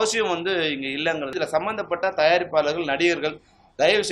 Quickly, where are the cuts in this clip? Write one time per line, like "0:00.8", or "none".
0:01.3